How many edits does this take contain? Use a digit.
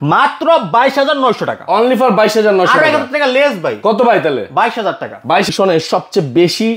1